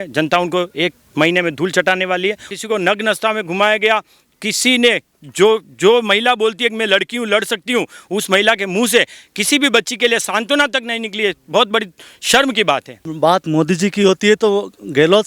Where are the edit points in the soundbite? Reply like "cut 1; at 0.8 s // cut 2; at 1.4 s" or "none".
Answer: cut 1; at 2.5 s // cut 2; at 13.1 s